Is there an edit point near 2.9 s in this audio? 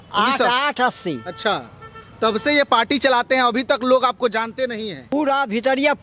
no; 1 cut; at 5.0 s

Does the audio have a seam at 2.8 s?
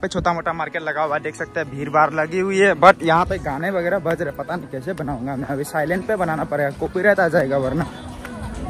no; 0 cuts

